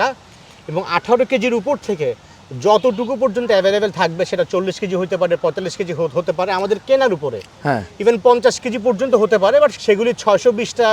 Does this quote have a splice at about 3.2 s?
no; 1 cut; at 9.8 s

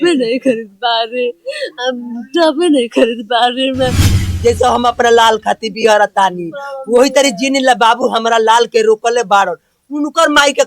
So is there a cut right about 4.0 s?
yes; 1 cut; at 4.0 s

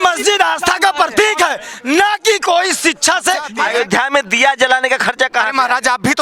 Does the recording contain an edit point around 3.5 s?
yes; 1 cut; at 3.5 s

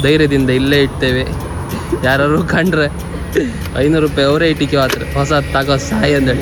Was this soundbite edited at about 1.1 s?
no; 0 cuts

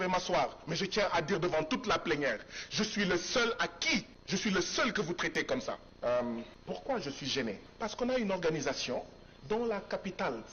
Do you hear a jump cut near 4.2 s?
yes; 4 cuts; at 4.2 s, 5.9 s, 6.5 s, 7.7 s

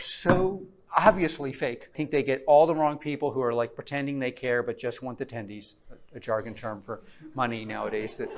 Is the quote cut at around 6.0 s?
no; 1 cut; at 2.0 s

